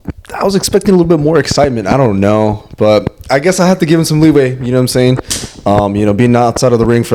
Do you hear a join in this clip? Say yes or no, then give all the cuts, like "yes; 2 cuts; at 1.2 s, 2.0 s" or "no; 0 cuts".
no; 0 cuts